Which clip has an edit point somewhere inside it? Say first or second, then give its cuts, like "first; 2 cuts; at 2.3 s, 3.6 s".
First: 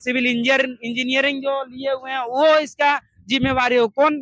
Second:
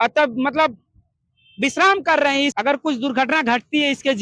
second; 1 cut; at 2.6 s